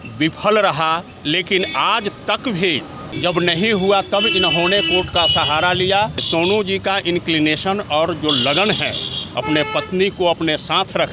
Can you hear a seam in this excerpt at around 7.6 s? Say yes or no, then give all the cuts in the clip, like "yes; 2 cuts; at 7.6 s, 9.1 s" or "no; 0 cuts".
no; 2 cuts; at 3.0 s, 6.2 s